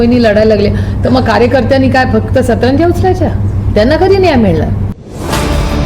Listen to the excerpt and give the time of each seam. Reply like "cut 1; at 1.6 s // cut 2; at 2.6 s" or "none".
cut 1; at 4.9 s